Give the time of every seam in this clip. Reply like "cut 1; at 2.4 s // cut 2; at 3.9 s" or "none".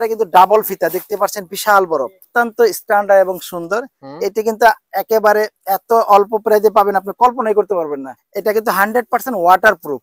cut 1; at 2.3 s // cut 2; at 8.2 s